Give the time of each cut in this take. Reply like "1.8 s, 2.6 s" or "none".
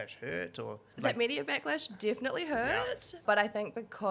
0.9 s, 3.2 s